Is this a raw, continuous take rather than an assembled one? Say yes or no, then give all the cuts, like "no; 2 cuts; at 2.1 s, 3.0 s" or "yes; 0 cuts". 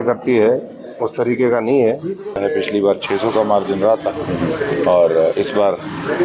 no; 1 cut; at 2.4 s